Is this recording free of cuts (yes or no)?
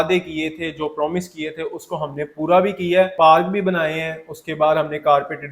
no